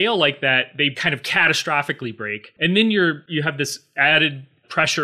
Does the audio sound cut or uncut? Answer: cut